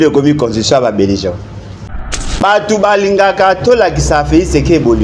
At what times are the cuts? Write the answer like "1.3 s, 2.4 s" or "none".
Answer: 2.0 s